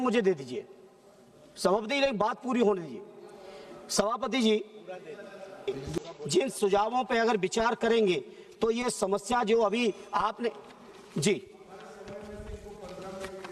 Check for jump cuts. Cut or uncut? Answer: cut